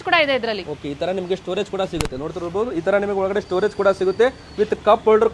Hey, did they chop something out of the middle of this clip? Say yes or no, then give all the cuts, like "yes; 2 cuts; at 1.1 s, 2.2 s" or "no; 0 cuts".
no; 0 cuts